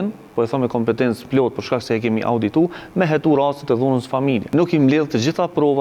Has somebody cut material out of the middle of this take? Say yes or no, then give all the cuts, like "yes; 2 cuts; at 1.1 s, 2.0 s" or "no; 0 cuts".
yes; 1 cut; at 4.4 s